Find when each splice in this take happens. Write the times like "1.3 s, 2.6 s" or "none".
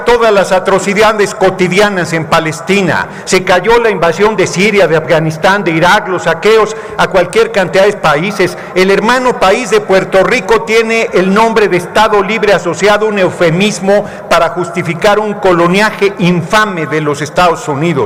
none